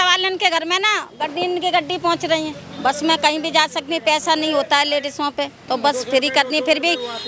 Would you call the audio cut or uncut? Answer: cut